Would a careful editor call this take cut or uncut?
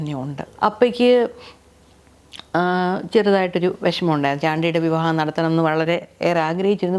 uncut